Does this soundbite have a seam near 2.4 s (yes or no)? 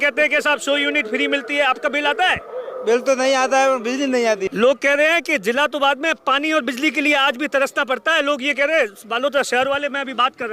no